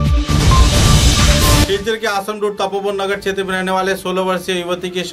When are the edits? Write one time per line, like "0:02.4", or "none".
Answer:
0:01.6